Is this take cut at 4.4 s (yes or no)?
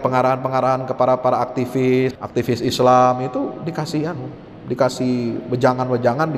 no